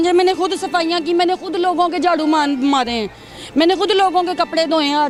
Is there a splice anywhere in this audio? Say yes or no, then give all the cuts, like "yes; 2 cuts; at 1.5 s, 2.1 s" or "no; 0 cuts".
no; 0 cuts